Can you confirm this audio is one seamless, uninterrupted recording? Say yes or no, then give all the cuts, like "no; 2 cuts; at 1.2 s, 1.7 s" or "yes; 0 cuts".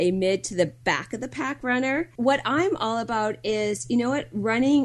no; 1 cut; at 2.1 s